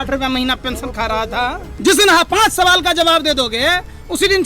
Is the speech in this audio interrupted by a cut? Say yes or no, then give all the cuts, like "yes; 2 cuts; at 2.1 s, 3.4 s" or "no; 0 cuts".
yes; 1 cut; at 1.6 s